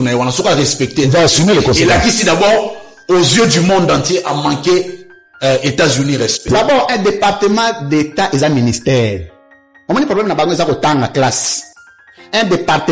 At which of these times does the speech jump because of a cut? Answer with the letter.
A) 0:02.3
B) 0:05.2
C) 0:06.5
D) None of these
C